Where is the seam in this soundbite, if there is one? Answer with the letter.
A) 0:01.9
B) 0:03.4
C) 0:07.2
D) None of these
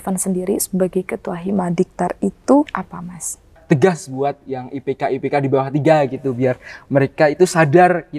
B